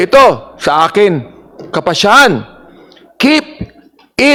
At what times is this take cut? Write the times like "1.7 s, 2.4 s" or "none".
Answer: none